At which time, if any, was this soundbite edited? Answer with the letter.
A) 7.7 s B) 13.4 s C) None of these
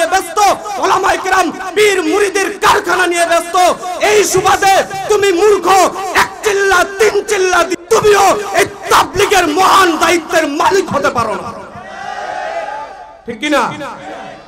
A